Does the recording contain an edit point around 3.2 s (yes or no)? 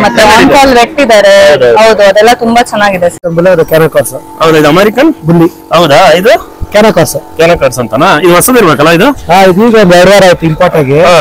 yes